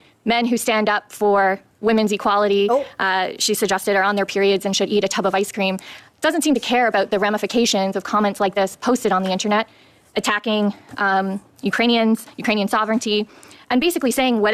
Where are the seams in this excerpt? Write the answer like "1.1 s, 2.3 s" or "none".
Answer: none